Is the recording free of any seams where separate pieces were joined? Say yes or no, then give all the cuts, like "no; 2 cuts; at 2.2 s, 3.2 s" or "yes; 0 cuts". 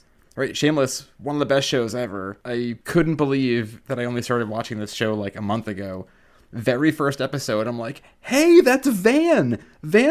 no; 3 cuts; at 1.1 s, 2.7 s, 3.8 s